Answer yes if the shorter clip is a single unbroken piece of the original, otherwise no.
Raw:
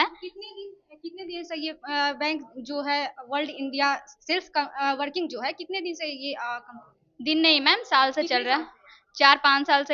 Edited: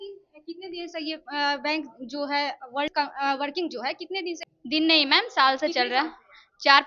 no